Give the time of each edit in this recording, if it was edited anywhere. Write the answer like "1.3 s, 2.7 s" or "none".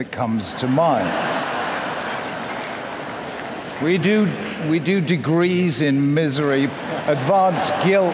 1.4 s, 6.8 s